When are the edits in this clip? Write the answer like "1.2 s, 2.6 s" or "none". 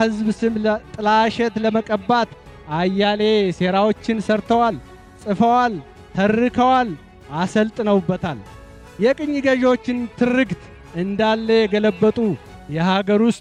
none